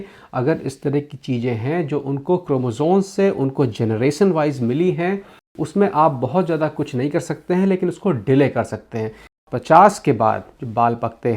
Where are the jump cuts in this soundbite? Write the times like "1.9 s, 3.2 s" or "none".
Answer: 5.3 s, 9.4 s